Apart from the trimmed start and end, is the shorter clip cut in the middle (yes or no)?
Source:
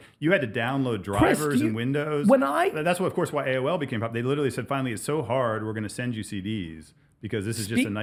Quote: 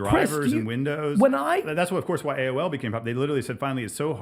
no